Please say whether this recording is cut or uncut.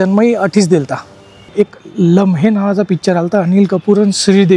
cut